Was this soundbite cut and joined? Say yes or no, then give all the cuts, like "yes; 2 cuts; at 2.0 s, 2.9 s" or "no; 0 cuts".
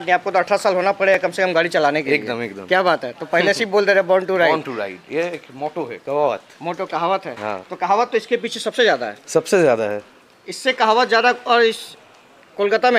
no; 0 cuts